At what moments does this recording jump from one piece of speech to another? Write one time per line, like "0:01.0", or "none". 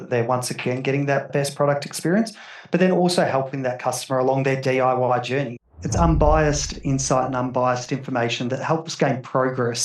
0:01.3
0:05.6